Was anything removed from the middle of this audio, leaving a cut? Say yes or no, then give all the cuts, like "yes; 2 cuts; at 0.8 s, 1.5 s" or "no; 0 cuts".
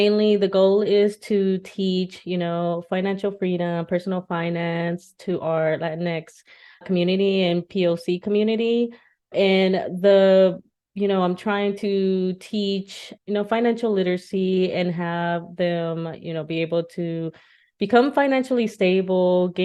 no; 0 cuts